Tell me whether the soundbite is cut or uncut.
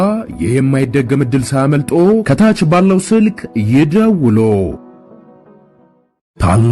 cut